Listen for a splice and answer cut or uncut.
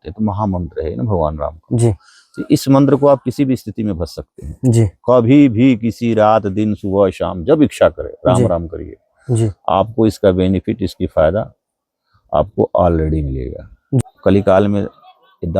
cut